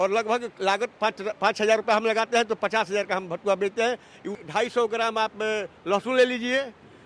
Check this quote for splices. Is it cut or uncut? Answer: cut